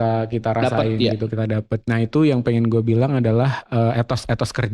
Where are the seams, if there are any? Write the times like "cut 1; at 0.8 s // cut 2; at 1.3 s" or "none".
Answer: cut 1; at 1.7 s